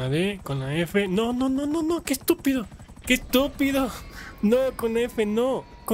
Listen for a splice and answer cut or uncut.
uncut